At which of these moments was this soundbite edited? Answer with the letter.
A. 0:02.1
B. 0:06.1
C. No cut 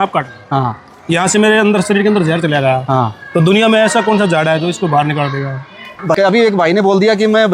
B